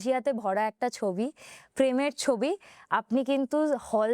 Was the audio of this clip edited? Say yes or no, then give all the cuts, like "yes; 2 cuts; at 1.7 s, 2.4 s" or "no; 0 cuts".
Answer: no; 0 cuts